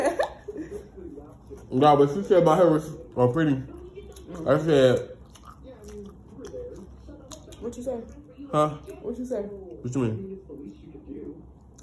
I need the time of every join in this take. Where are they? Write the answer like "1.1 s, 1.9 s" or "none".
2.2 s, 8.2 s

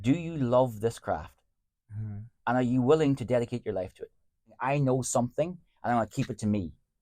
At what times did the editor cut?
4.6 s

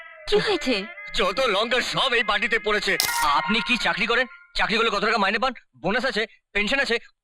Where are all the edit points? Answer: 3.1 s

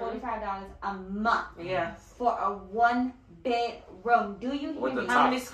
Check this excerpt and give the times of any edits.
none

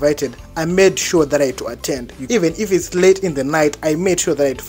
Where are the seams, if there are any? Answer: 2.2 s

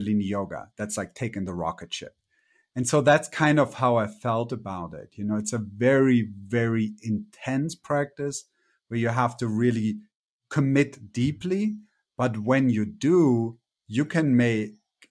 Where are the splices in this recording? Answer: none

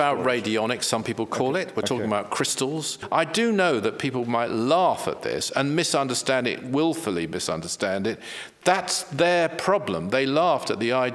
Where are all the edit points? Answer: 3.0 s

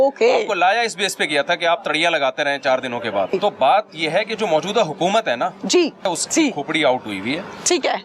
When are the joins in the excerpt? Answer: 3.3 s, 6.1 s

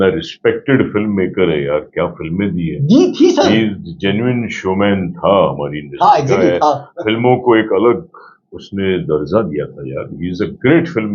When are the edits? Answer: none

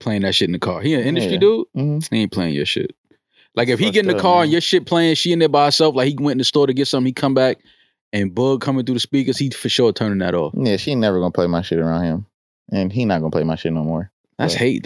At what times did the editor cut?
none

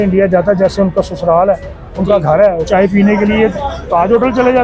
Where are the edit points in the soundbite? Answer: 2.7 s

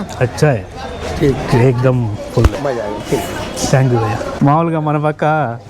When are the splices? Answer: 4.3 s

